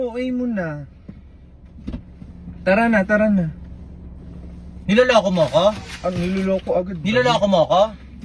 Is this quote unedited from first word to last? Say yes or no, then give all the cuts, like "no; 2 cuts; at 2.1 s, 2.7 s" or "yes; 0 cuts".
yes; 0 cuts